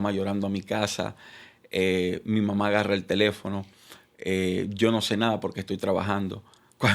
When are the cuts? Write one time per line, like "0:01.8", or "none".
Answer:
none